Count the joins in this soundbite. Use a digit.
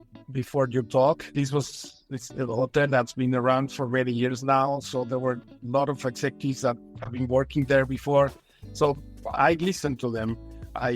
1